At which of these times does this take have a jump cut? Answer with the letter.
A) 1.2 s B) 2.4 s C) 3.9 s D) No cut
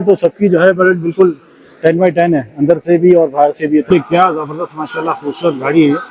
C